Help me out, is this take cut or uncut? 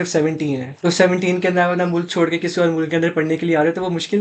uncut